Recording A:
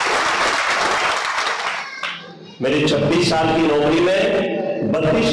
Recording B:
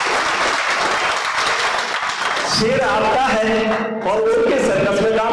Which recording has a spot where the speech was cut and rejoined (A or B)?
A